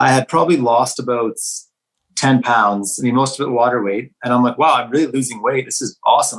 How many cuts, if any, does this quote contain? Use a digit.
0